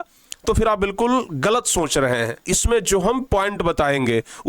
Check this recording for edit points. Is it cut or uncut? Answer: cut